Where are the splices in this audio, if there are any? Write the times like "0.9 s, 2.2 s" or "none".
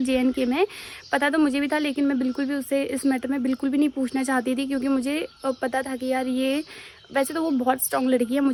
none